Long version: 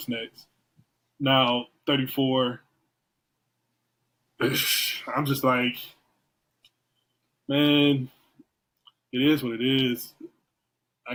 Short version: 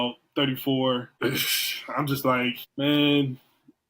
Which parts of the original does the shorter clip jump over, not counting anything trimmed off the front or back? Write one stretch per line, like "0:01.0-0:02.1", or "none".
0:02.6-0:04.3
0:05.8-0:07.4